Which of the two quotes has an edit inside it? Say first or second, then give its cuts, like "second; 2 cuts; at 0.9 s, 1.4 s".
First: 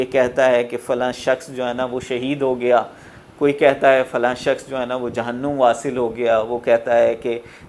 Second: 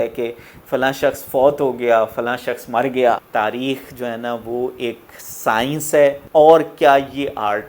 second; 2 cuts; at 3.3 s, 6.2 s